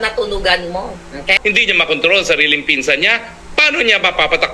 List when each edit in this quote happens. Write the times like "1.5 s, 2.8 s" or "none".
1.4 s